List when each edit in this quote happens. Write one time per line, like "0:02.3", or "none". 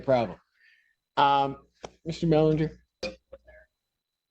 0:03.0